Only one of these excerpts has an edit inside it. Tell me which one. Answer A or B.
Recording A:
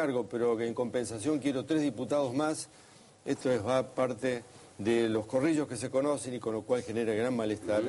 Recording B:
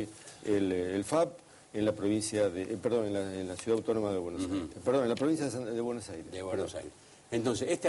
A